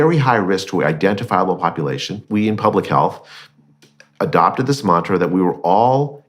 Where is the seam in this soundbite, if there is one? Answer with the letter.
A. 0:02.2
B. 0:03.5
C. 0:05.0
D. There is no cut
A